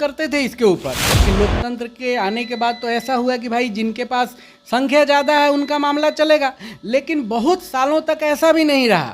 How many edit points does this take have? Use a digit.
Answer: 1